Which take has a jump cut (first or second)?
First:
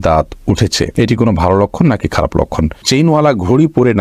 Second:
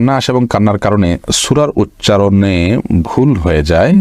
first